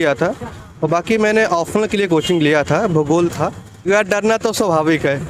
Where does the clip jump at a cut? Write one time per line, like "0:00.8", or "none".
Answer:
0:03.8